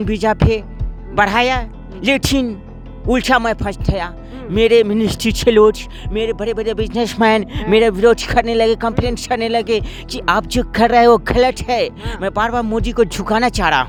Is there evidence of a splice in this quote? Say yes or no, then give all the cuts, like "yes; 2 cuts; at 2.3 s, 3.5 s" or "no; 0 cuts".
no; 0 cuts